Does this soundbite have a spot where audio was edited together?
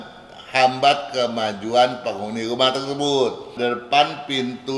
yes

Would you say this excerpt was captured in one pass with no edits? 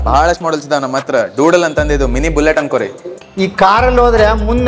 no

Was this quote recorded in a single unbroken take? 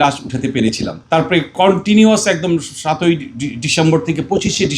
no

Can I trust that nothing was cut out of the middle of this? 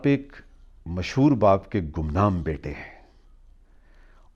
yes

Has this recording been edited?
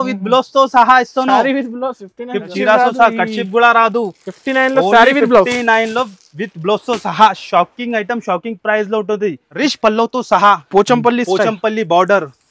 yes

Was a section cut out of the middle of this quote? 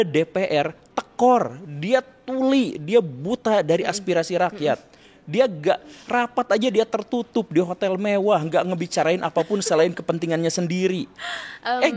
no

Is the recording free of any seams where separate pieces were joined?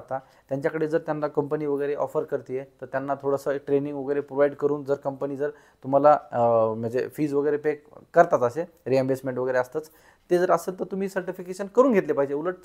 yes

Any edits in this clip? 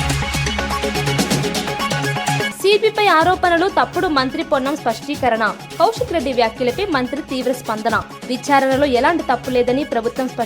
yes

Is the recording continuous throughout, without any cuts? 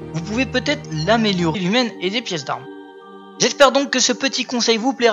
yes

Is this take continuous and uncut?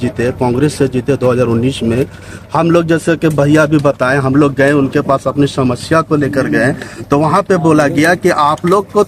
yes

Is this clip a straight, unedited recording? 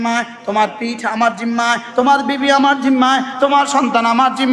yes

